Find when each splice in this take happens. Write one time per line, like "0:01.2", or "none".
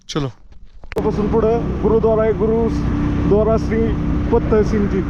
0:01.0

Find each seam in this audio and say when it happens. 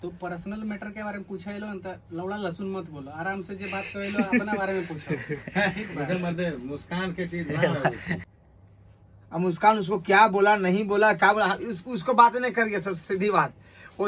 none

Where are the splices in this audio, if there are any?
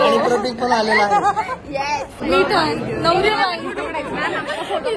0:02.2

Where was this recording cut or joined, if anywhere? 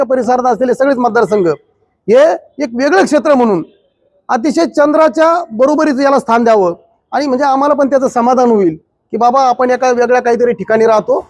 none

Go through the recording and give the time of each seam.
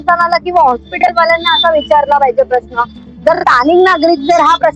none

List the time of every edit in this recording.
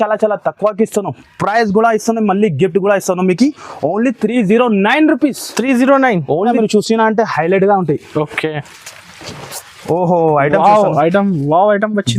0:06.5

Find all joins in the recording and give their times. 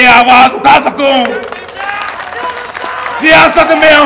none

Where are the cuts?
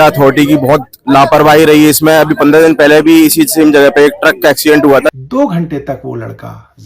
0:05.1

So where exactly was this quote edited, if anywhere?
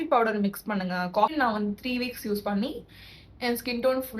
0:01.3

